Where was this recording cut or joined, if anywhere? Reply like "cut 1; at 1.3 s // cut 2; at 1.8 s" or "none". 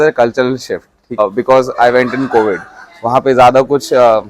cut 1; at 1.2 s